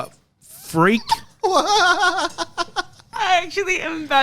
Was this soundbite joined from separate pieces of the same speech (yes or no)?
yes